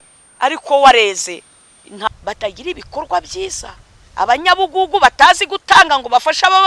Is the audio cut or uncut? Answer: cut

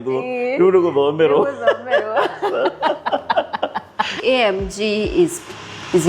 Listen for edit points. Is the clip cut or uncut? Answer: cut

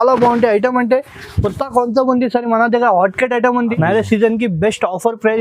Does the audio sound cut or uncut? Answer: cut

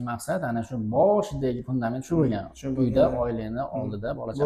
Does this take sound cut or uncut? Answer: uncut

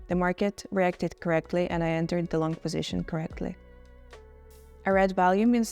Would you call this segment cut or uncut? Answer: uncut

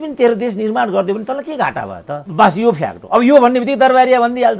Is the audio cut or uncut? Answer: cut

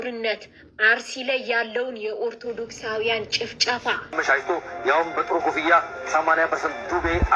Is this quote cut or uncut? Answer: cut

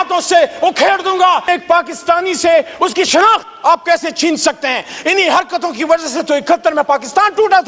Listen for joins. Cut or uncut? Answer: cut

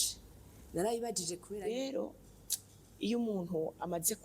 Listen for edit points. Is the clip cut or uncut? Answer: cut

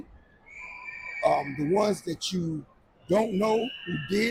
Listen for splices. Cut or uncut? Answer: uncut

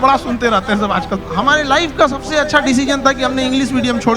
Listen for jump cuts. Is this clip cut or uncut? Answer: cut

